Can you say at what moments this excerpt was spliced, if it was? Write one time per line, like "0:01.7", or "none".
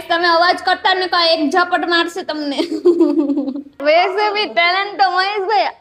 0:03.7